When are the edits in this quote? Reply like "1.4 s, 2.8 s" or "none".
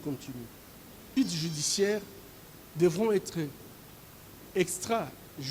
1.0 s